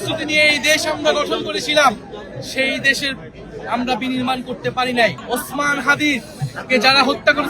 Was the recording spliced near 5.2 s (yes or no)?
yes